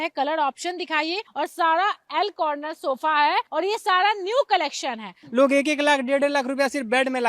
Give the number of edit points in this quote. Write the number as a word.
three